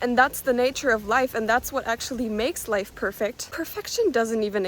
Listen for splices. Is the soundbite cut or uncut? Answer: cut